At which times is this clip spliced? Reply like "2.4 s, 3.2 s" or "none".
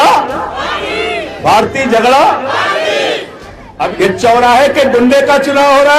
3.8 s